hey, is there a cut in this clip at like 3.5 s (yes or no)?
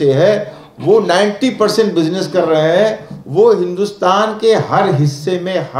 no